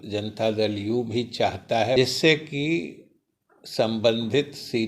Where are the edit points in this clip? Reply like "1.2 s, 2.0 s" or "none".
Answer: 2.0 s